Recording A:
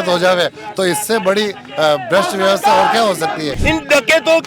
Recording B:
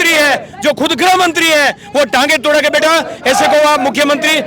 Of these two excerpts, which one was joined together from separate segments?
A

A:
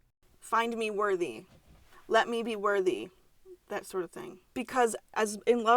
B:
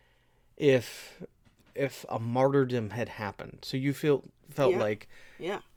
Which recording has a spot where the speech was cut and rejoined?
A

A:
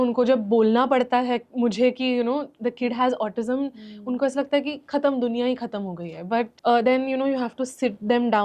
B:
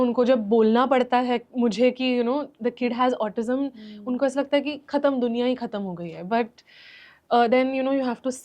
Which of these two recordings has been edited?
A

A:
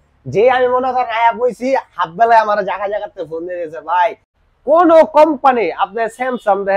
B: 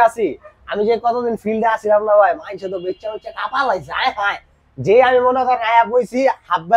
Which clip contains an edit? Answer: A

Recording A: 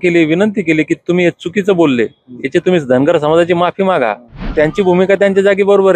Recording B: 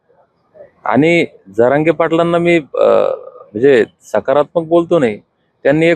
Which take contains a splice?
A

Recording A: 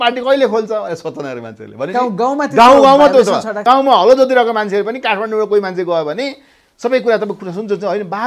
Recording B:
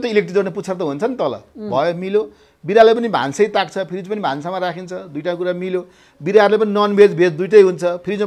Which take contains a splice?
A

